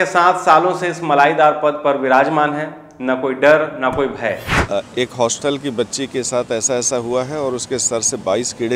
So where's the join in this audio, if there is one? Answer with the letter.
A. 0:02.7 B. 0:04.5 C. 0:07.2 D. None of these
B